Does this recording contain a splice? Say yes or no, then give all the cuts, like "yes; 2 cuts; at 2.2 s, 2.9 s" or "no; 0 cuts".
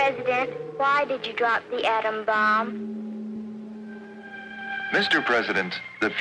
no; 0 cuts